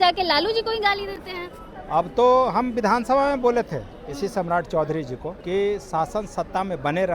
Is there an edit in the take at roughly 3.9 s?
no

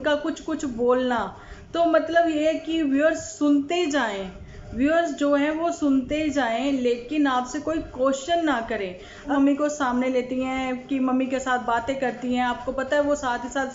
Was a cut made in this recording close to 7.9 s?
no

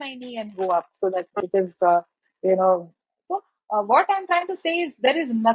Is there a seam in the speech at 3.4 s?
no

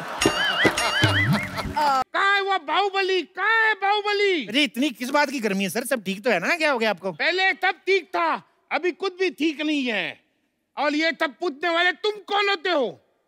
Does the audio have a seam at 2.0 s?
yes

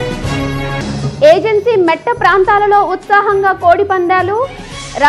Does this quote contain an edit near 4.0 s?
no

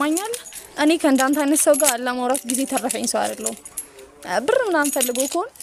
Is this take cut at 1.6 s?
no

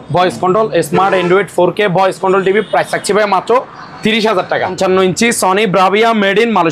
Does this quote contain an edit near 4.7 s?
yes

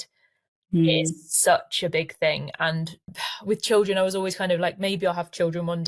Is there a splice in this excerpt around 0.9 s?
no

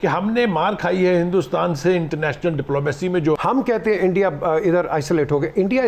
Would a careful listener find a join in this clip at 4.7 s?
no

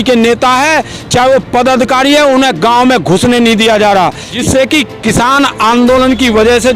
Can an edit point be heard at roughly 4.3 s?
yes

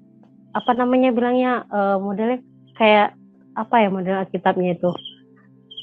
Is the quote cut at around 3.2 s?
no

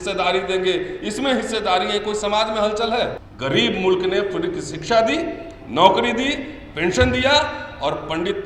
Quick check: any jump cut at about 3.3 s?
yes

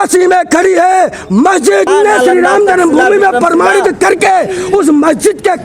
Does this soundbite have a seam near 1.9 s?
yes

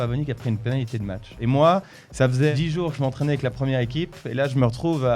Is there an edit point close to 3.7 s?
no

